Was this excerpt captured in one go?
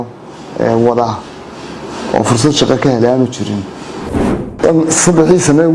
no; 1 cut; at 4.0 s

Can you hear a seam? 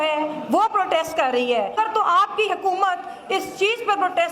yes; 1 cut; at 1.7 s

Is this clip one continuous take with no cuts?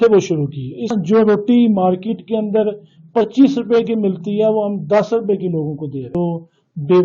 no; 2 cuts; at 0.9 s, 6.1 s

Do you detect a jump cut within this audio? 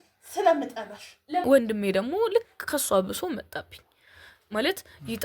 yes; 1 cut; at 1.4 s

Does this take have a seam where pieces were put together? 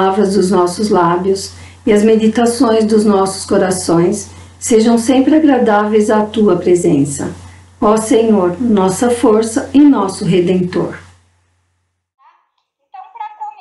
no; 0 cuts

